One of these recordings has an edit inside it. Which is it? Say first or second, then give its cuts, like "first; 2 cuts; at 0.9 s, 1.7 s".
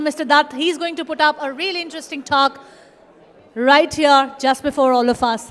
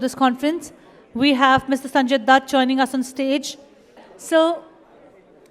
second; 1 cut; at 4.1 s